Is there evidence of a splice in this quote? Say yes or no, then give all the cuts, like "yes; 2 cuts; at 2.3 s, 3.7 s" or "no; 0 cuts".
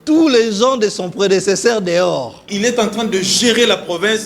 yes; 1 cut; at 2.4 s